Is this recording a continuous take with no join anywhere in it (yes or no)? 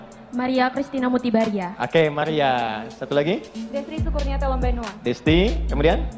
yes